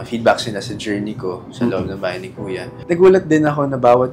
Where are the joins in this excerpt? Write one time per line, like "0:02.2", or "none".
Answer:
0:02.7